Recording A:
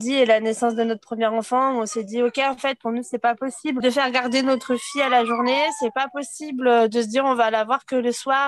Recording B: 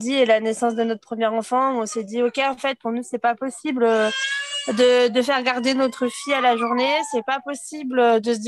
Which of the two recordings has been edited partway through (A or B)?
A